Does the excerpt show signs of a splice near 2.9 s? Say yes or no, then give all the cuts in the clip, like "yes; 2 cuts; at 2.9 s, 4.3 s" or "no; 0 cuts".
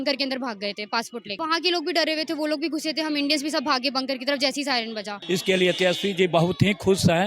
no; 2 cuts; at 1.4 s, 5.2 s